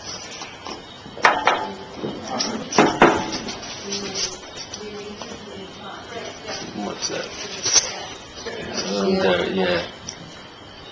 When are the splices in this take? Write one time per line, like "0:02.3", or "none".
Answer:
none